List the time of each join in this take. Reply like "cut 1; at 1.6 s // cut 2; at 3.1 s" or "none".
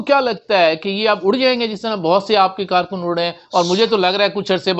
none